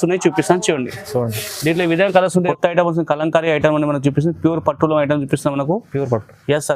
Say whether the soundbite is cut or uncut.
cut